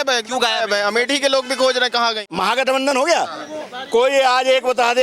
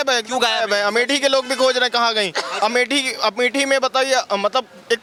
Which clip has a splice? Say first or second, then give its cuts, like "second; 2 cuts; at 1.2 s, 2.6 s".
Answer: first; 1 cut; at 2.2 s